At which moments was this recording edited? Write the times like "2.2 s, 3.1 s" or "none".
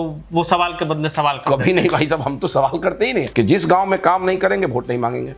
3.3 s